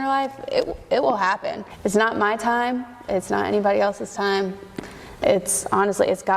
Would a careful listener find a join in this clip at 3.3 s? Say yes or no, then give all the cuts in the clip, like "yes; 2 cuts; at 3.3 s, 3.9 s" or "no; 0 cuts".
no; 1 cut; at 1.7 s